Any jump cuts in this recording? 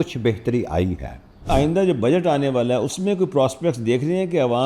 yes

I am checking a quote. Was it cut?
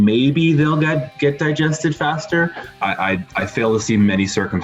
yes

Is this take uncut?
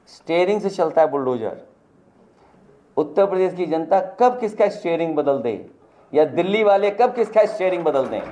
yes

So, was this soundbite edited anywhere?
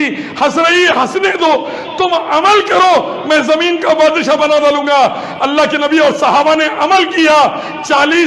no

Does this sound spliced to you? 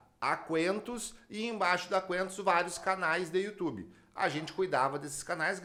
no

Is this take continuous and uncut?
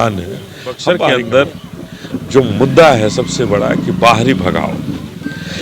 no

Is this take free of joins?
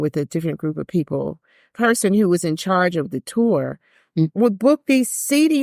no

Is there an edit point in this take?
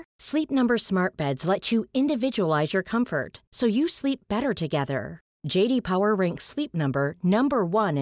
no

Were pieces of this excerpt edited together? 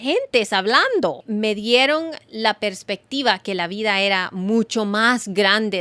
no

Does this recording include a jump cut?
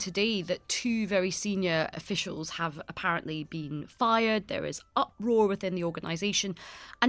yes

